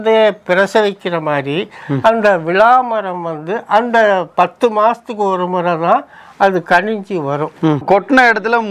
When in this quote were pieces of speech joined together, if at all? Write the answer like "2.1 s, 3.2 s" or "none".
7.8 s